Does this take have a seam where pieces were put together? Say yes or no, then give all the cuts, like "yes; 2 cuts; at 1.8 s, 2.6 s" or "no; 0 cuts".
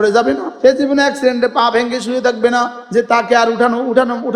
yes; 1 cut; at 2.8 s